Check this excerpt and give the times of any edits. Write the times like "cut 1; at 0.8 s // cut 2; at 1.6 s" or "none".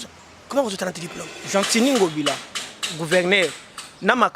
cut 1; at 1.3 s